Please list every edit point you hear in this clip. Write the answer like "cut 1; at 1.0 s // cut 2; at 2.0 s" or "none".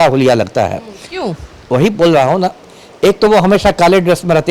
none

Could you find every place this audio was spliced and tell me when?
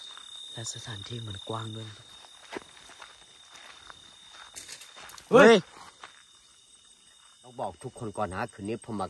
cut 1; at 2.0 s // cut 2; at 7.5 s

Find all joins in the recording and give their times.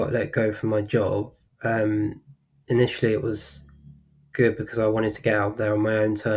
none

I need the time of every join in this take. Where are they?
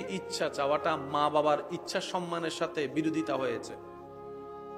cut 1; at 3.7 s

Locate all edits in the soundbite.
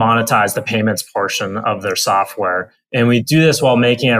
cut 1; at 3.2 s

